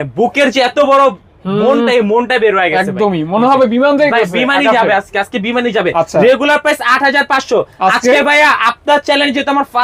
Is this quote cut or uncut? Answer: uncut